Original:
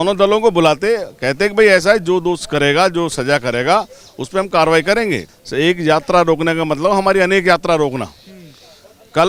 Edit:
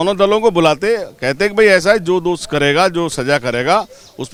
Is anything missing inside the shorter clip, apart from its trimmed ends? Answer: no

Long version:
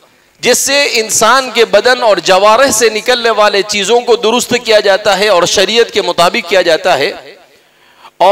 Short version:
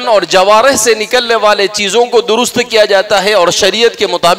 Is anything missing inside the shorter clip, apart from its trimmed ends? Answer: no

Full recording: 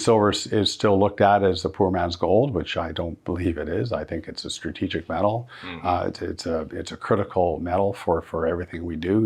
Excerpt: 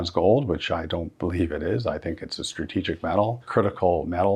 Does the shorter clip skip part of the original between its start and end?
yes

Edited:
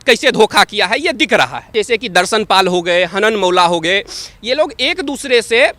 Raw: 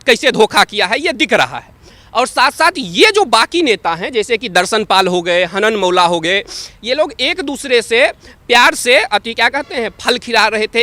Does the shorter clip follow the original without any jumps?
no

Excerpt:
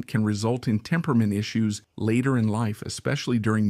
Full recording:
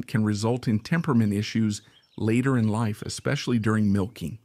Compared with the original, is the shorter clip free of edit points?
no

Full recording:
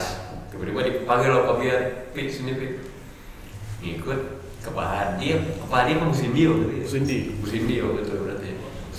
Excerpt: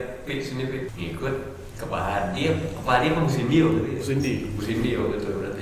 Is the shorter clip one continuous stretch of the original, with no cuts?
no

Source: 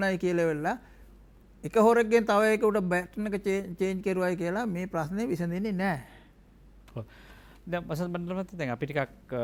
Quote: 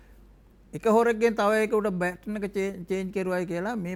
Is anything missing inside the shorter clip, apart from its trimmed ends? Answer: no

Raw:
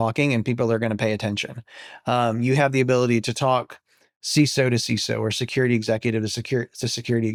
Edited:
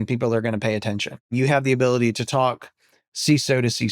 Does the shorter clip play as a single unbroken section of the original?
no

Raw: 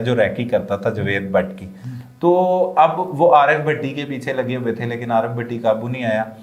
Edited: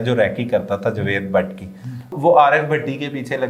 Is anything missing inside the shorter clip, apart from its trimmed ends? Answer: yes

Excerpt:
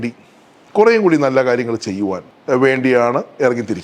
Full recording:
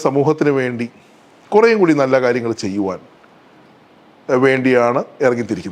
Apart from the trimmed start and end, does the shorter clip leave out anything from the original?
yes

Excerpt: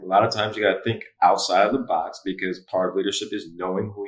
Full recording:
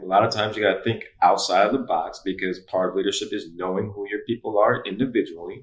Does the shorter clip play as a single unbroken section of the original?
yes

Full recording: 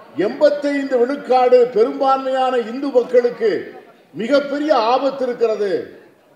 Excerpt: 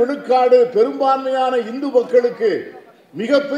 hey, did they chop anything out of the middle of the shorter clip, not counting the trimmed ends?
no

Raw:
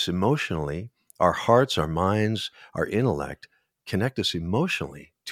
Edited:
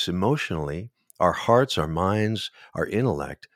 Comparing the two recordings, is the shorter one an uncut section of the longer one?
yes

